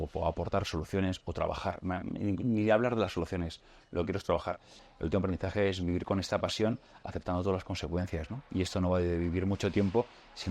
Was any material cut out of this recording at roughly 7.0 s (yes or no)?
no